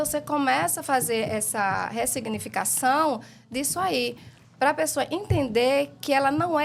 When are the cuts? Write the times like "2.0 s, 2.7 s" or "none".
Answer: none

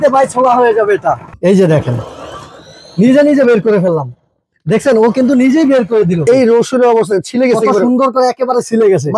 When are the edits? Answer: 1.3 s, 6.2 s

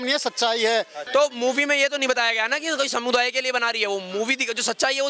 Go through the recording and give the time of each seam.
1.0 s

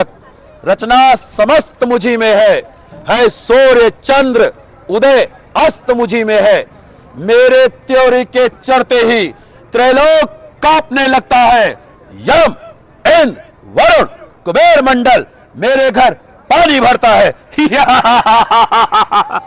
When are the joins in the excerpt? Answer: none

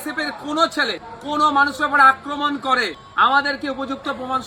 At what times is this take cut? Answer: 1.1 s, 3.0 s

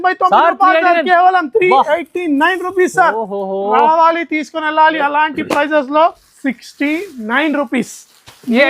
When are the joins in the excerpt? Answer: 6.3 s

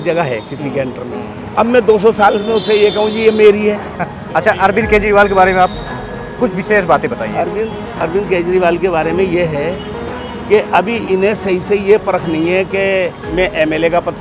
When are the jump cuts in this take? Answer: 4.0 s

